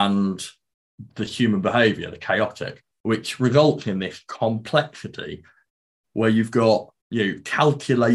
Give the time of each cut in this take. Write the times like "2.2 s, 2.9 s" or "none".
5.7 s, 7.0 s